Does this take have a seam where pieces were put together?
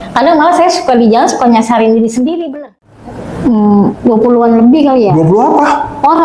yes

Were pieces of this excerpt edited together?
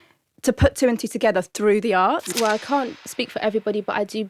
yes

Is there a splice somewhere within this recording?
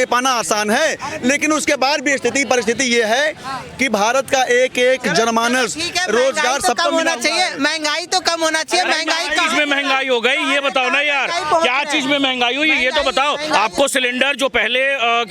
no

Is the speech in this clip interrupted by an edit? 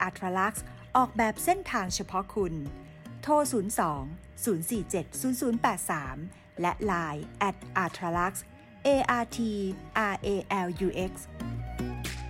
yes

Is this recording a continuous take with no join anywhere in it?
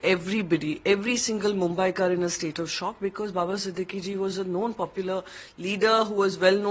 yes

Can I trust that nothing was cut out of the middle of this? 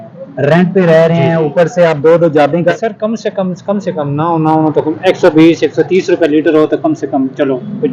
no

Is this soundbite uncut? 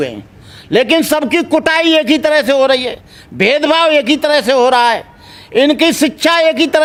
yes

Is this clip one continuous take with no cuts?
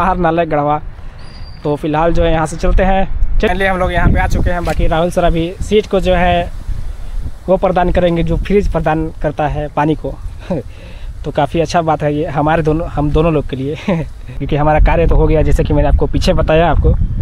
yes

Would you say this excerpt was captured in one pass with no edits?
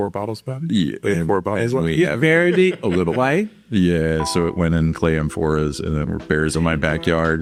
yes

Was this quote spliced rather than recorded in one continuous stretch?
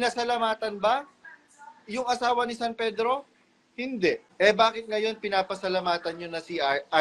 yes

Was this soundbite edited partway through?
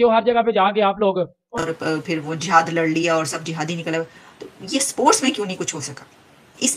yes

